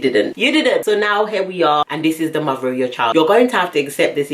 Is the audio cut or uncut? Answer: cut